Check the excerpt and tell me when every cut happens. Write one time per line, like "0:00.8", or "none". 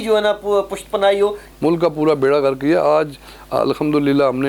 0:01.5